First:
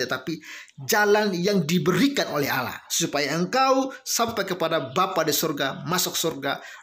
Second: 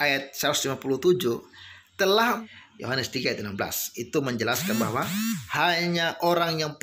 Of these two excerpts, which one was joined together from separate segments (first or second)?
second